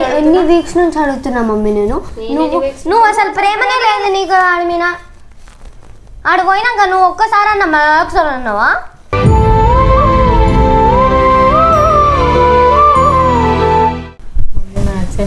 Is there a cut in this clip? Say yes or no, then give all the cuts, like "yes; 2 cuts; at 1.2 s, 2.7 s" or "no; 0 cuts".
yes; 1 cut; at 14.0 s